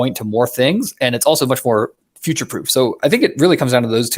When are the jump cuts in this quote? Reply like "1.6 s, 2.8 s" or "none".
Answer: 2.0 s